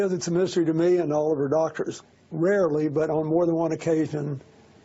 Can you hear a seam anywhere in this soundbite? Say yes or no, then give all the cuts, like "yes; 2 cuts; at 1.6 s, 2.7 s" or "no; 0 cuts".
yes; 1 cut; at 2.0 s